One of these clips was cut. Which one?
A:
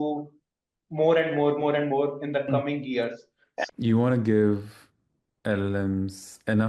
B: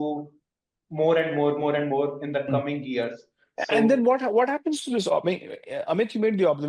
A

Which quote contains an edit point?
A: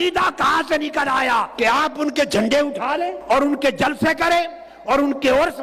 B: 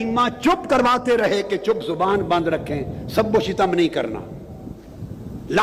A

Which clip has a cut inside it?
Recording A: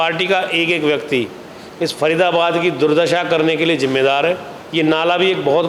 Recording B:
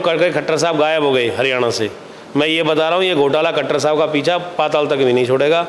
A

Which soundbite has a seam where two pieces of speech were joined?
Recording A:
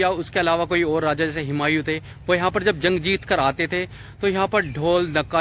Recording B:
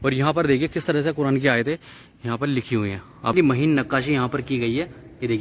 B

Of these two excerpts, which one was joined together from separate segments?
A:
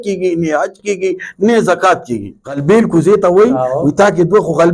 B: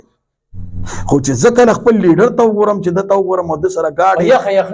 A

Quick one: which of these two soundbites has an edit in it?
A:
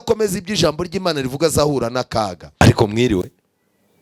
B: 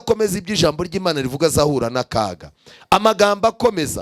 A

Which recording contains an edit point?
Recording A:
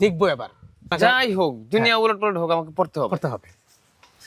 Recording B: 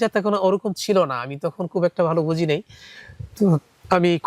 A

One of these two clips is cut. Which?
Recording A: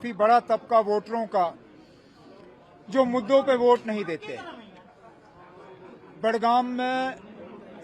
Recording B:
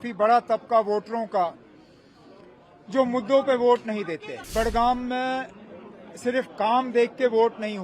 B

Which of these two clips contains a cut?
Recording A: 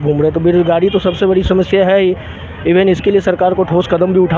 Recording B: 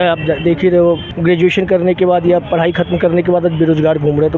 B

